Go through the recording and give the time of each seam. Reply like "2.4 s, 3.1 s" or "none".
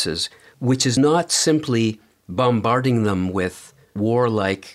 none